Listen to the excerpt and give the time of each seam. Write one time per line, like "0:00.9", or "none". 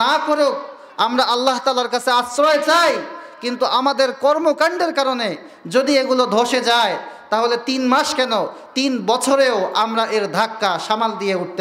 none